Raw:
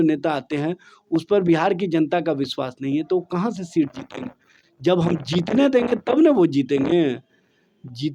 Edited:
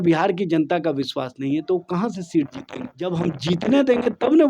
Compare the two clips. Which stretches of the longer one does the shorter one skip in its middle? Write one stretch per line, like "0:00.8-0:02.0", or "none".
0:04.4-0:04.8

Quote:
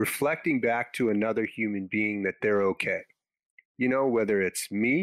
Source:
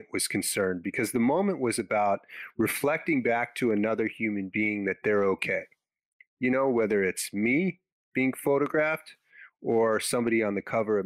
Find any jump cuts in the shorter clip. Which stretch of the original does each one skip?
none

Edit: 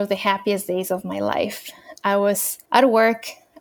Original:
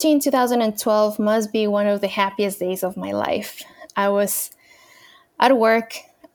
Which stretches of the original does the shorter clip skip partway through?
0:04.5-0:05.2

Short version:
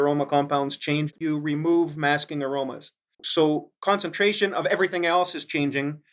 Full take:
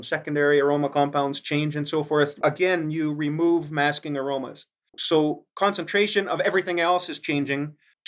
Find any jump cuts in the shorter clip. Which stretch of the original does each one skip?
0:01.8-0:02.9

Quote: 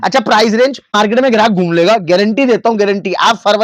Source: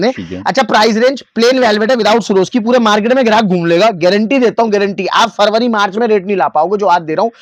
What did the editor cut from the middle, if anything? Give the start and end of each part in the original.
0:01.3-0:02.9

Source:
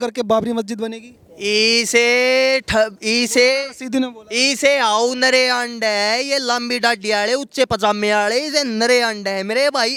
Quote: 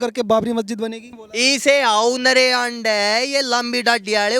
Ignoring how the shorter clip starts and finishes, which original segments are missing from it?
0:01.2-0:04.2

